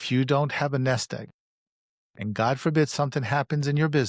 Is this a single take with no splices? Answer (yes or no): yes